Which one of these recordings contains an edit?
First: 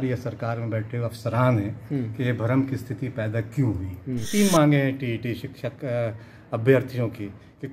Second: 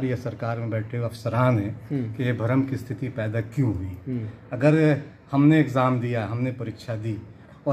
first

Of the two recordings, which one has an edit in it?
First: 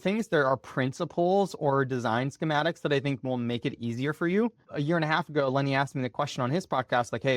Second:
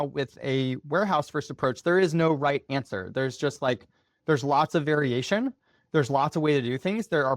first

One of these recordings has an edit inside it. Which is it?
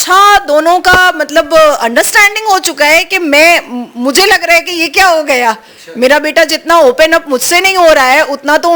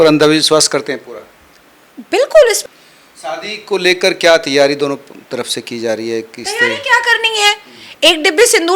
second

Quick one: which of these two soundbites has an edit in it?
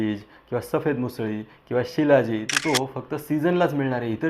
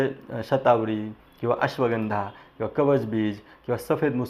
first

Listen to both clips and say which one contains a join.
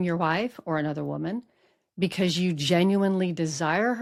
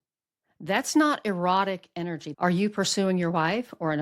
second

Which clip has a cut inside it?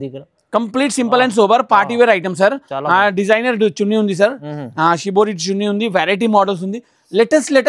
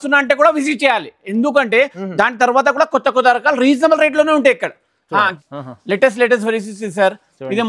second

